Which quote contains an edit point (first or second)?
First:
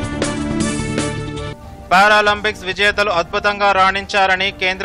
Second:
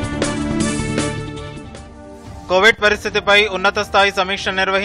first